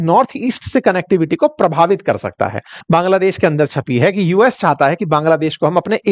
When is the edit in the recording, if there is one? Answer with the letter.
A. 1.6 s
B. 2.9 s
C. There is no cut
B